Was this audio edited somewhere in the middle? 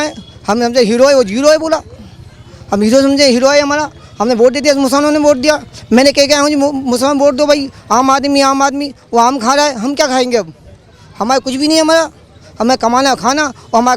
no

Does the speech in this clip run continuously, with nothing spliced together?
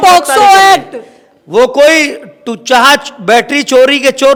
yes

